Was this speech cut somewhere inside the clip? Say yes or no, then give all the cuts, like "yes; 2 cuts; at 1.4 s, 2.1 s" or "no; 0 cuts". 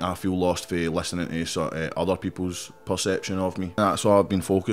yes; 1 cut; at 3.7 s